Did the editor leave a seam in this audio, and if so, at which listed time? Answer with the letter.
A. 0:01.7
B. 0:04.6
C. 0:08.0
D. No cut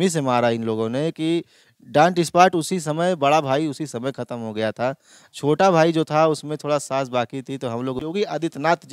C